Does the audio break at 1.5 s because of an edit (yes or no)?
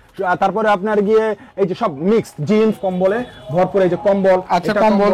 no